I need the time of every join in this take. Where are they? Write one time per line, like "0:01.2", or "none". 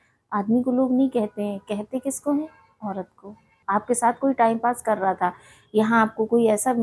0:03.5